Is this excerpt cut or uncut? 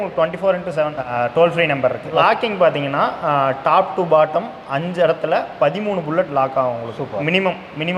cut